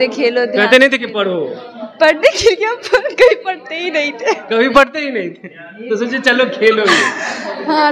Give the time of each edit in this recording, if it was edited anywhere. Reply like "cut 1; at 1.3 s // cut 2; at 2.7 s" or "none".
none